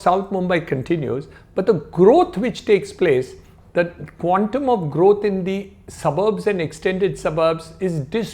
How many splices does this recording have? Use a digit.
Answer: 0